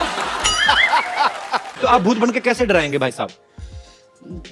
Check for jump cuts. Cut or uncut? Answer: cut